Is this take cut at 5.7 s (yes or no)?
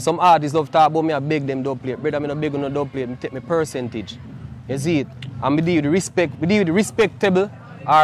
no